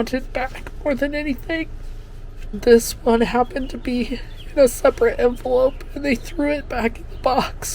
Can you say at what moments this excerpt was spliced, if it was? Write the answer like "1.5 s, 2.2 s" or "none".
2.5 s